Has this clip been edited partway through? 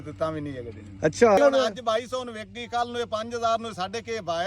yes; 1 cut; at 1.4 s

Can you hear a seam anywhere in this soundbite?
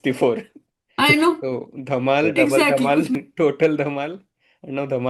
yes; 1 cut; at 3.1 s

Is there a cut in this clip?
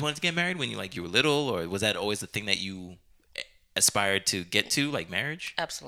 no; 0 cuts

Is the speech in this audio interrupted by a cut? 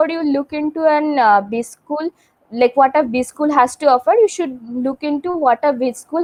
no; 0 cuts

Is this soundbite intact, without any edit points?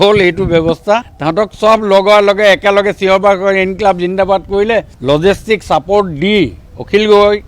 no; 2 cuts; at 1.2 s, 4.9 s

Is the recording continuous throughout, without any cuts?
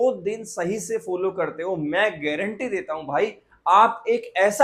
yes; 0 cuts

